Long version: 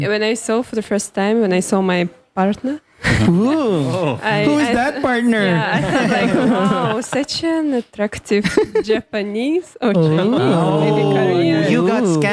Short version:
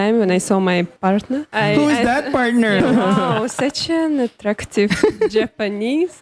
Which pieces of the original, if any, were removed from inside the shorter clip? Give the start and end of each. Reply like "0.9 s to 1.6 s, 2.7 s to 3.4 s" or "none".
2.3 s to 3.8 s, 5.5 s to 6.3 s